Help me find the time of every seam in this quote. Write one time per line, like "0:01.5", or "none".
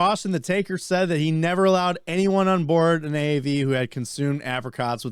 none